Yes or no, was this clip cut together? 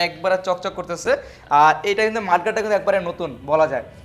no